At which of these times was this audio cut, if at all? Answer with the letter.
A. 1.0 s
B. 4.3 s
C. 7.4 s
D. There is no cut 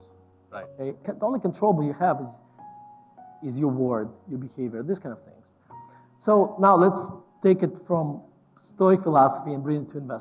A